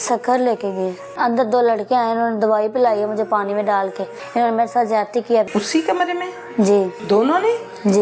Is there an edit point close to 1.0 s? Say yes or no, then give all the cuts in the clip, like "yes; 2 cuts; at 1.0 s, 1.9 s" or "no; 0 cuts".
yes; 4 cuts; at 1.0 s, 4.2 s, 5.5 s, 7.0 s